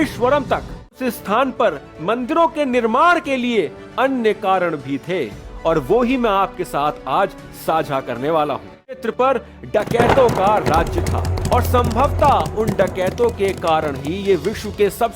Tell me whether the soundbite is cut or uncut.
cut